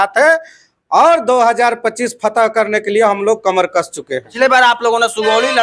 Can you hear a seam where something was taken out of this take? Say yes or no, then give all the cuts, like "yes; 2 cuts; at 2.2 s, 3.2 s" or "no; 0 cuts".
yes; 1 cut; at 4.3 s